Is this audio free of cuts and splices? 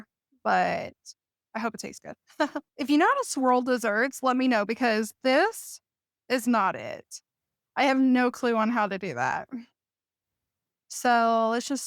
yes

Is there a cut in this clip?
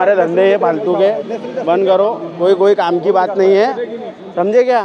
no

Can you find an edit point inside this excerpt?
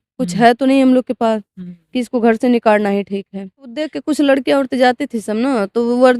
yes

